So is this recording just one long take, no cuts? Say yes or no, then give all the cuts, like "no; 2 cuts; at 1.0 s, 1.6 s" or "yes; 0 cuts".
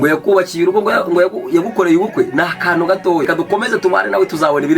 no; 1 cut; at 3.3 s